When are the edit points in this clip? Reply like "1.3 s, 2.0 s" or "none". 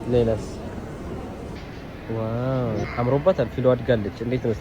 1.5 s